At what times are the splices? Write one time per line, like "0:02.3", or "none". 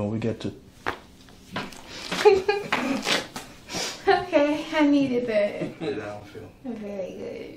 0:05.7